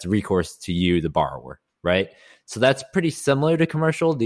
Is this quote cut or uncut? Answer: uncut